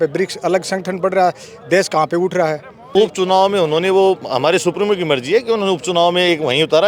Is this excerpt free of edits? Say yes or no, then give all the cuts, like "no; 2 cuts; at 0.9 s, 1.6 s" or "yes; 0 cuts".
no; 1 cut; at 2.9 s